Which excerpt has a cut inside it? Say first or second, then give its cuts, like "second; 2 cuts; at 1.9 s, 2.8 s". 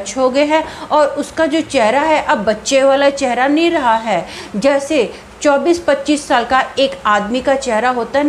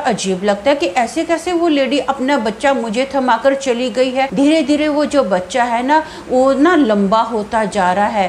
second; 1 cut; at 4.3 s